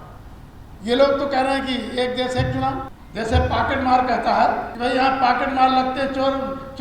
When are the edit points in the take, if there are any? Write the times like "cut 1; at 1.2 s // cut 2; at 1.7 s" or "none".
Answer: cut 1; at 3.0 s // cut 2; at 4.7 s